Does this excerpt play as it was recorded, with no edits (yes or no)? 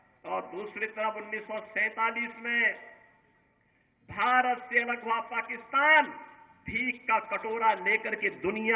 yes